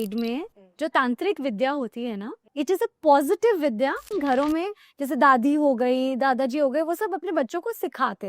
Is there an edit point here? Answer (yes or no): yes